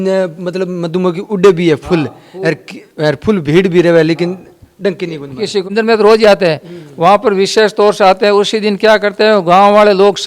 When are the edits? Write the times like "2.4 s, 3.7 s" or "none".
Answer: 5.7 s

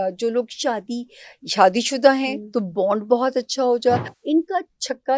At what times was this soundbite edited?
4.1 s

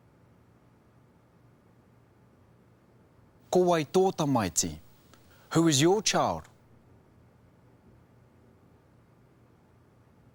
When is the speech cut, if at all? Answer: none

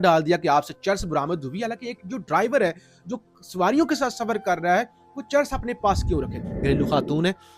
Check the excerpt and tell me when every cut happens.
6.4 s

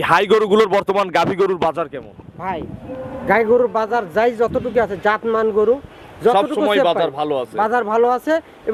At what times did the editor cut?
none

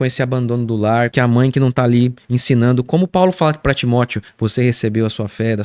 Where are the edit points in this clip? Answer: 1.1 s, 4.2 s

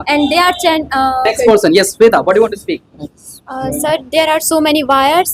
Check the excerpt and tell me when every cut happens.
1.5 s

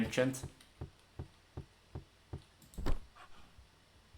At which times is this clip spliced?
none

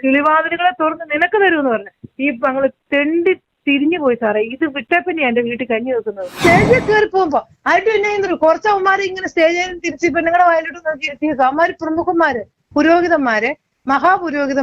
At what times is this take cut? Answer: 6.3 s

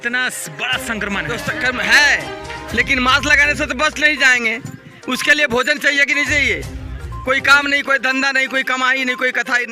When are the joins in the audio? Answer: none

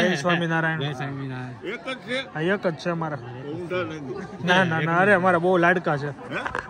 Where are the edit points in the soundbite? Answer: none

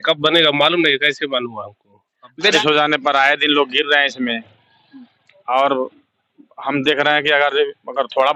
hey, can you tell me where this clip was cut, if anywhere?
2.5 s

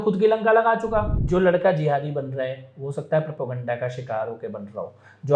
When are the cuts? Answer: 1.1 s

